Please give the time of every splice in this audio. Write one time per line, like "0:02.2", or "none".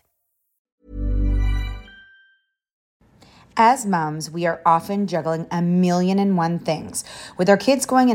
0:02.9